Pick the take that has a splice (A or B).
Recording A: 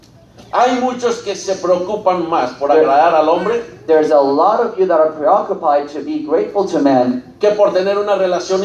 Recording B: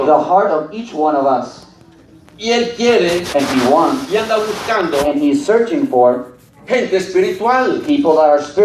B